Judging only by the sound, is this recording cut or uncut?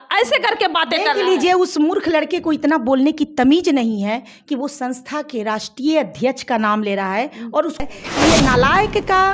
cut